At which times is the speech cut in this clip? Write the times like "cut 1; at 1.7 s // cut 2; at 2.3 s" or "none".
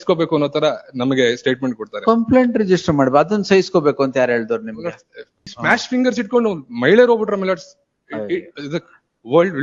cut 1; at 5.5 s